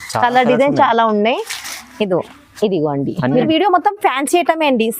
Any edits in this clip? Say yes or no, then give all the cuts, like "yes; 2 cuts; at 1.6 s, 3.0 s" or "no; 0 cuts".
yes; 1 cut; at 3.5 s